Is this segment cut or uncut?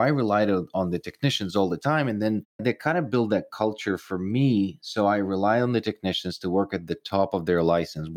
cut